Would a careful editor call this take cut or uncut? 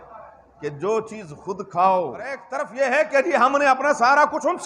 cut